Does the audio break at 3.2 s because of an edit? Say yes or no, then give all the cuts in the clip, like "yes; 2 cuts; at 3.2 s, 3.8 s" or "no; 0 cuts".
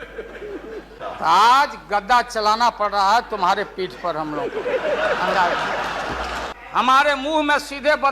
no; 2 cuts; at 1.0 s, 6.5 s